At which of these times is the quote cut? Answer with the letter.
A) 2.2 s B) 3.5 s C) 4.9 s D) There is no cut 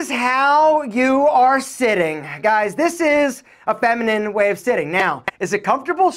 D